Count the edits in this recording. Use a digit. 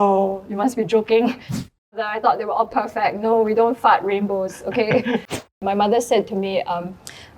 2